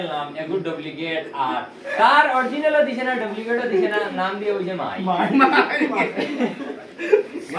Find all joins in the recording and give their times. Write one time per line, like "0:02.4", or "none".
none